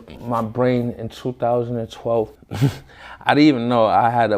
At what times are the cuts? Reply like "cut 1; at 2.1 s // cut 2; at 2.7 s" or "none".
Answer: cut 1; at 2.4 s